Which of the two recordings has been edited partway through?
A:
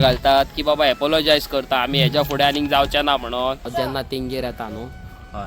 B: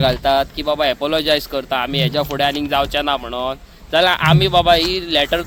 A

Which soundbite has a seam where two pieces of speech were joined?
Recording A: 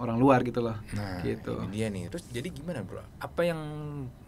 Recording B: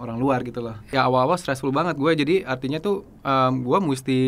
B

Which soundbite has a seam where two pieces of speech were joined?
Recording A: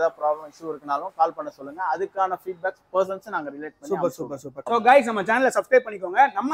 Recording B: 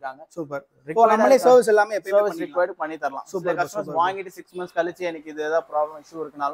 A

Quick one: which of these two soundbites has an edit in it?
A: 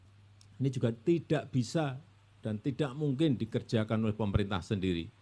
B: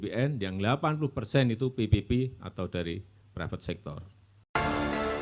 B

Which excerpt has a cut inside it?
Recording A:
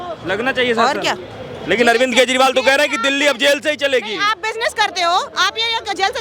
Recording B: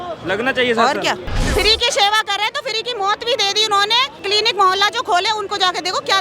B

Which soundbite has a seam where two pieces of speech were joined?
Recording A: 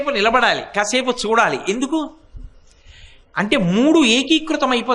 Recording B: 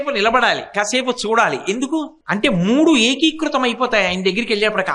B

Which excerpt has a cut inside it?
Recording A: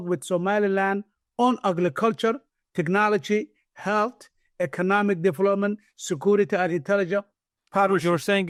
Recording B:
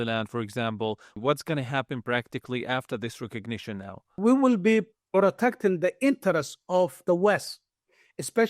B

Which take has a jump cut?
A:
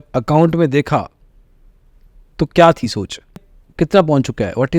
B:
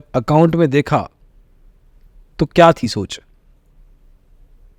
A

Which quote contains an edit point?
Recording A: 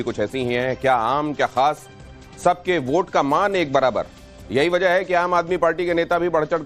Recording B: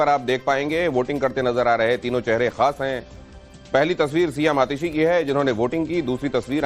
A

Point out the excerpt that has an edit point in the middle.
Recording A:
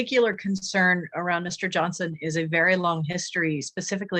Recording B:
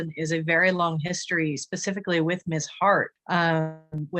B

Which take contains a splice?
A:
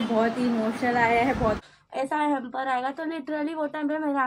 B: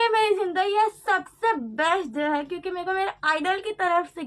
A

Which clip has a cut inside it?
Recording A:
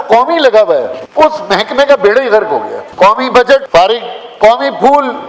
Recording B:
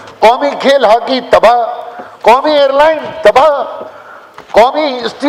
A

